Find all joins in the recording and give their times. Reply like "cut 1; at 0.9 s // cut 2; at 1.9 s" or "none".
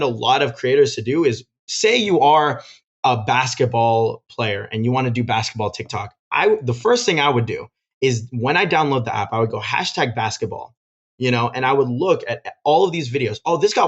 none